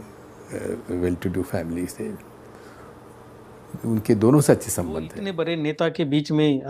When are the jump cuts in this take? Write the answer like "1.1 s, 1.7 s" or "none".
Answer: 5.2 s